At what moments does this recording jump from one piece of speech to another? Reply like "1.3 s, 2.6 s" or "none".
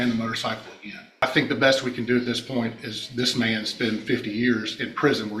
1.2 s